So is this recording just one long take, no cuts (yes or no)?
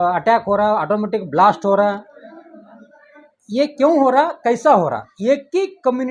no